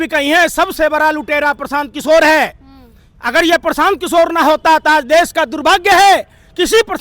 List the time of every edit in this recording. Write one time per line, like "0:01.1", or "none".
none